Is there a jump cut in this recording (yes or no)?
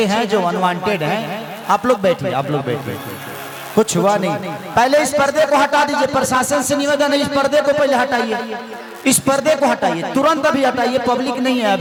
no